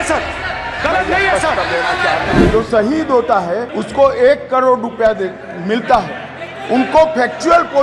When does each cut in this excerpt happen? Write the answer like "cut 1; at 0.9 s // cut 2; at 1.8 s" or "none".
cut 1; at 2.4 s // cut 2; at 3.8 s